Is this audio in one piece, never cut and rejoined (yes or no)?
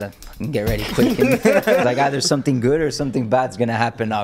no